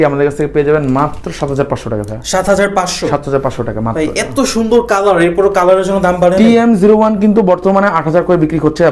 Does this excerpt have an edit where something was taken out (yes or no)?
no